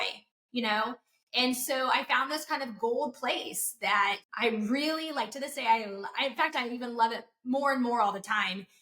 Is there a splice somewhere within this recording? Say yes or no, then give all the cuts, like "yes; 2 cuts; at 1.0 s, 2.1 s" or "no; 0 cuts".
yes; 1 cut; at 4.2 s